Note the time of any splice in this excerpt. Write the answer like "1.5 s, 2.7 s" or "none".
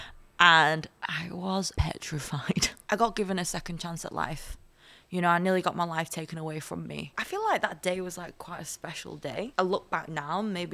1.7 s, 2.8 s, 7.2 s, 9.5 s